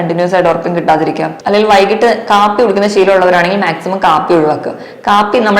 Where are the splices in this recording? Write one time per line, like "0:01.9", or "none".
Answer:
0:01.3